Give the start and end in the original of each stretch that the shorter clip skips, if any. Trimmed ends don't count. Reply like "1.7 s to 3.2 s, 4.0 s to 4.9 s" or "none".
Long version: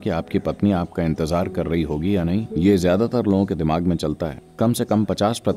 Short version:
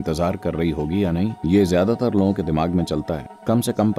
none